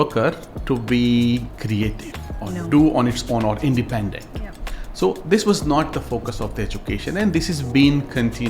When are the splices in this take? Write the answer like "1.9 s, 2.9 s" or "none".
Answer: 1.5 s